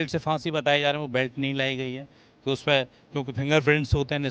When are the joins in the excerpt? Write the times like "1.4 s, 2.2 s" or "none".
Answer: none